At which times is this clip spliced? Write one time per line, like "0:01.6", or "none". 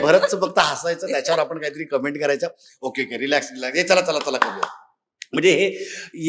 none